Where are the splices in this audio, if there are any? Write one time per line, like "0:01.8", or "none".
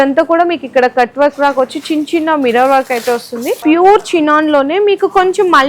0:03.6